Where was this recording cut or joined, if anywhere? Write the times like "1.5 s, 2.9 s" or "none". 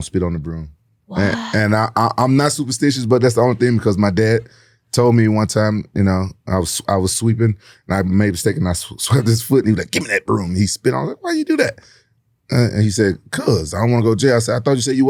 none